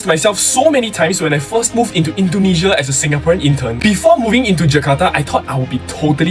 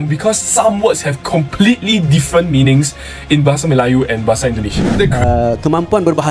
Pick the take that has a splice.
second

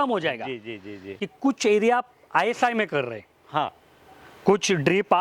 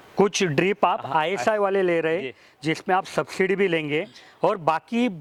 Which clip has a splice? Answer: first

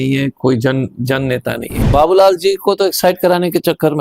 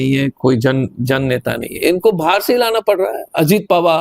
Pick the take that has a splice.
first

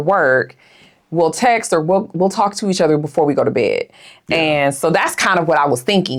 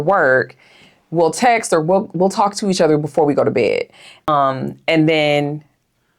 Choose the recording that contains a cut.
second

